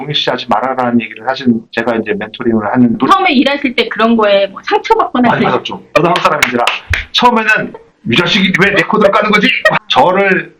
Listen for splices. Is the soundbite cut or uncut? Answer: cut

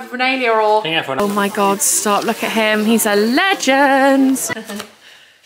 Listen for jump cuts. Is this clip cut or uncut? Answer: cut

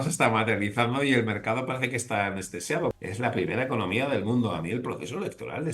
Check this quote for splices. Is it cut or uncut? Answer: cut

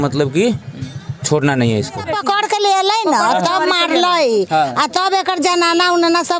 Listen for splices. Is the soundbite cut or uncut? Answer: cut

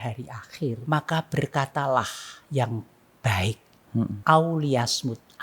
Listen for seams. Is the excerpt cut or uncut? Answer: cut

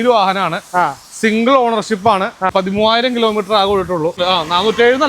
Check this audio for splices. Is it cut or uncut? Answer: cut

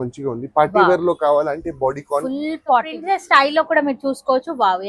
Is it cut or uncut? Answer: cut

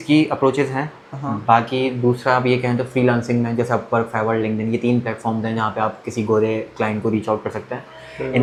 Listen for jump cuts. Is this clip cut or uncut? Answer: uncut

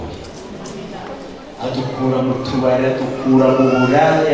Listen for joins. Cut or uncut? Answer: uncut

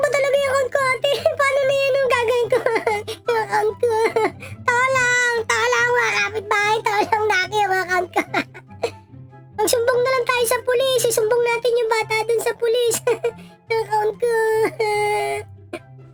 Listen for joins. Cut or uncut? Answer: uncut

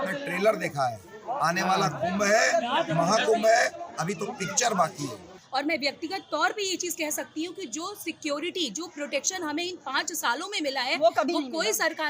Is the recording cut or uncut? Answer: cut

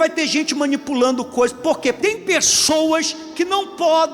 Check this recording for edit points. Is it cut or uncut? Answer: cut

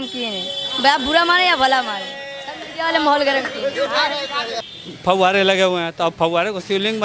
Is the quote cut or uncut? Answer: cut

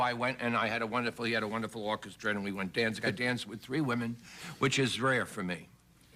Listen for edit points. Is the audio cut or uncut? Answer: cut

